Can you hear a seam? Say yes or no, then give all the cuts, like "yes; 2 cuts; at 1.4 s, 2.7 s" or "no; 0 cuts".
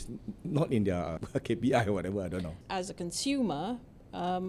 yes; 2 cuts; at 1.2 s, 2.6 s